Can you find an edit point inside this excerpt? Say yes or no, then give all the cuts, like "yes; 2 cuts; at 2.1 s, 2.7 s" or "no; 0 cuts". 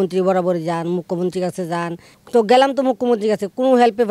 yes; 1 cut; at 2.1 s